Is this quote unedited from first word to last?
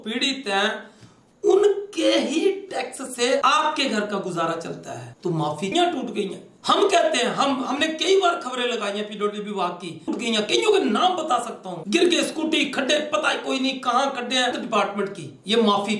no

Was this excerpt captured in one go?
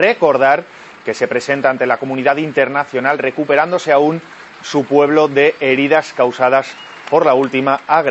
yes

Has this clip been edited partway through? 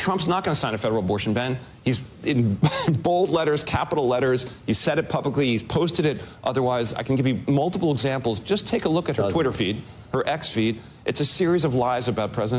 no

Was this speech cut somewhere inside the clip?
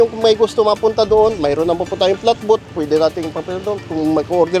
no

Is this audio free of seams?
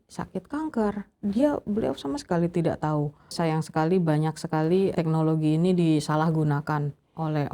no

